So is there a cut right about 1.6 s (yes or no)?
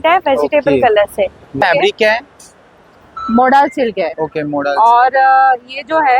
yes